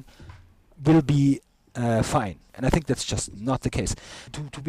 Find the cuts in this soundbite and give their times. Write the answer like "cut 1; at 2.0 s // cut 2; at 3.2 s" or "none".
cut 1; at 2.5 s